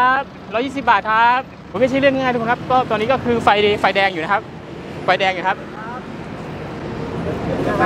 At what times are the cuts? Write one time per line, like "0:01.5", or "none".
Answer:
0:01.6